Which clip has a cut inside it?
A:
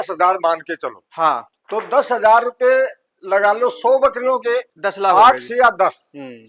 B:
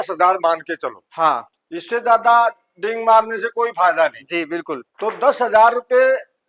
A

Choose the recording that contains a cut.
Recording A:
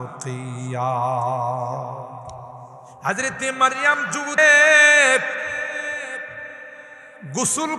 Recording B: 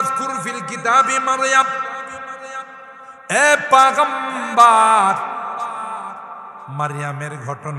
A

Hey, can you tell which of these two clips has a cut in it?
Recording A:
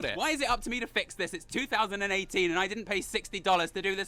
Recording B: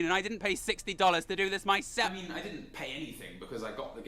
B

